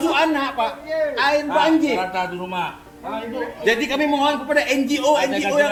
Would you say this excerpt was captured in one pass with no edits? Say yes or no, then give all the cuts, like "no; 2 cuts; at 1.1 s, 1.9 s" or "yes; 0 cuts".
yes; 0 cuts